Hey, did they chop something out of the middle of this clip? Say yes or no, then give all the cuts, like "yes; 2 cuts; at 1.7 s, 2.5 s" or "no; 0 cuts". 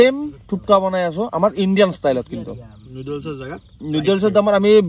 no; 0 cuts